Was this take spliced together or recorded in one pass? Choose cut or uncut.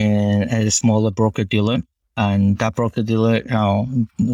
cut